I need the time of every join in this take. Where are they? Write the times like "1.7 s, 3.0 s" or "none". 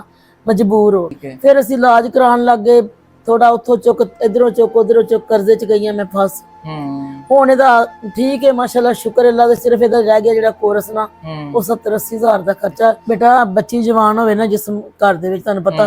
1.2 s, 13.0 s